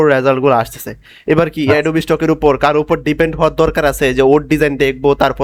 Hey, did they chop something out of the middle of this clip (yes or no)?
no